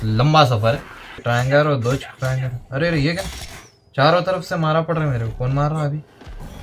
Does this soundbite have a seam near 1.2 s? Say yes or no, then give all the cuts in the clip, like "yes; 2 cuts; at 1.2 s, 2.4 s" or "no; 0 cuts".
yes; 1 cut; at 1.2 s